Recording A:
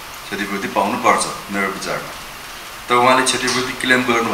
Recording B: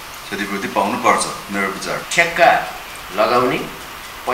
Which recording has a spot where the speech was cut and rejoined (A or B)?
B